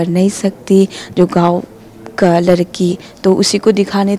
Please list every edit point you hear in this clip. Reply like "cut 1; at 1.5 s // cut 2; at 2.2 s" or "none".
none